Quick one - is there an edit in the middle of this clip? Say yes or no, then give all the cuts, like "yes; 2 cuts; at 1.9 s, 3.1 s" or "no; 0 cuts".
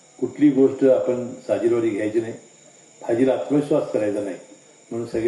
no; 0 cuts